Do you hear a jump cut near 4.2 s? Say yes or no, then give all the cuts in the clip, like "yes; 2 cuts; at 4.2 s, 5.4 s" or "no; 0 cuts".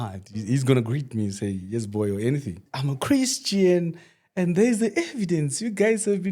no; 1 cut; at 2.7 s